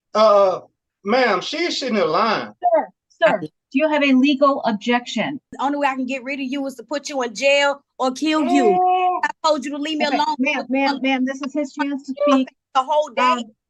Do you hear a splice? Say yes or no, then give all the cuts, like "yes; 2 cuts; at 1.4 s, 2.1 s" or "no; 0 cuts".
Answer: yes; 1 cut; at 5.5 s